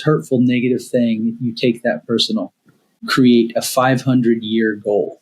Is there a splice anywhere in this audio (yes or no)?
yes